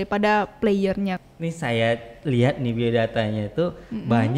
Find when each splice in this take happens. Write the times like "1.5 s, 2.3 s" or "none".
1.2 s